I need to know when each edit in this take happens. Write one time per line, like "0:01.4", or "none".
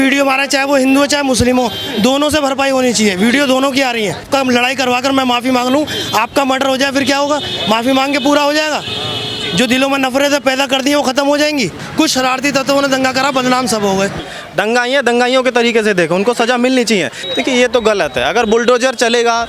0:04.2
0:11.8
0:14.2
0:17.2